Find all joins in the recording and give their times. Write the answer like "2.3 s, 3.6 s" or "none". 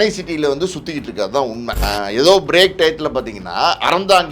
1.8 s

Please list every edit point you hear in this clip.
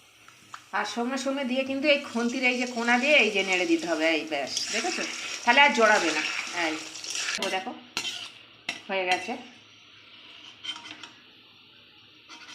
7.4 s

